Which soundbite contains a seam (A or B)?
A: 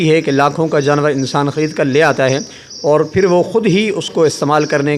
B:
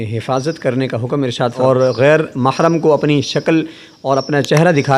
B